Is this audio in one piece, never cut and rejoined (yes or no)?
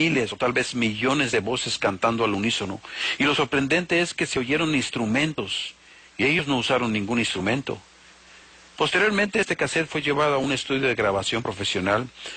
no